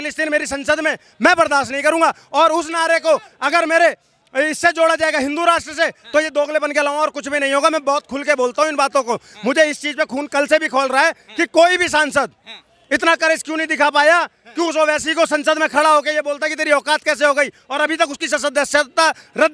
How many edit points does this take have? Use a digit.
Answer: 0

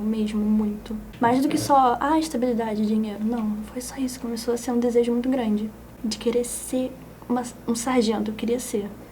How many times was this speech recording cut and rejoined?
2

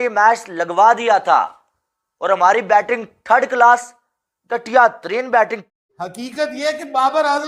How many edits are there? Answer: 1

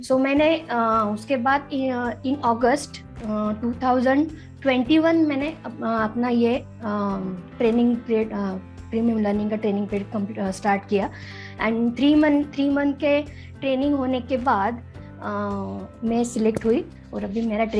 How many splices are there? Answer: 2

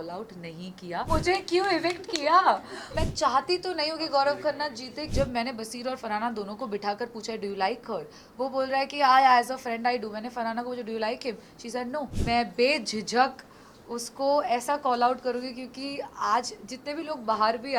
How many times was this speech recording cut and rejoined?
4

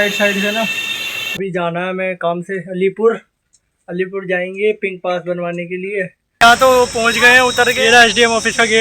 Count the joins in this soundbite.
2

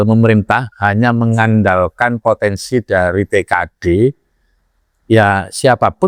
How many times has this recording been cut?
0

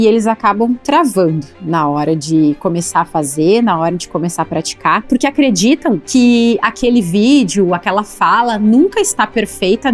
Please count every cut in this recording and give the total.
2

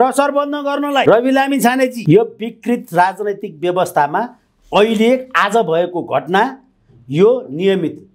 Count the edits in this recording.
2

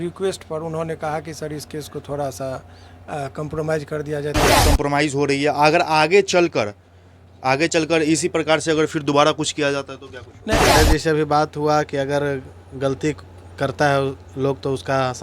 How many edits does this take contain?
2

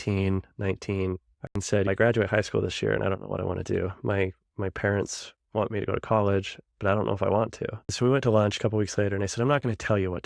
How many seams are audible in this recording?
2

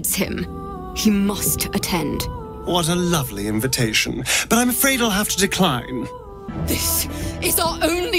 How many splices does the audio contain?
1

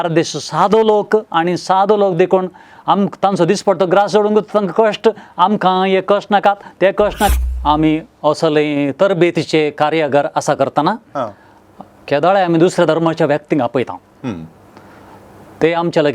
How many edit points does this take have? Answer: 1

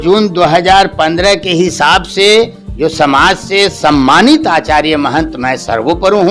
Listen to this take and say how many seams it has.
0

